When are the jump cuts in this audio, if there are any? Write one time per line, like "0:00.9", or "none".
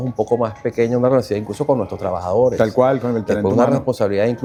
none